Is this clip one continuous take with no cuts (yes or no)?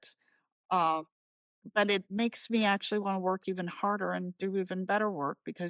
no